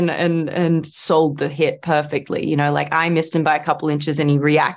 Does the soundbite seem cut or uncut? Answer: uncut